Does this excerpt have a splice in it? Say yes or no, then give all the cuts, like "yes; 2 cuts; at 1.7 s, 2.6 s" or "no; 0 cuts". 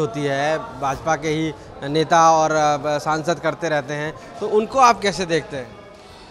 no; 0 cuts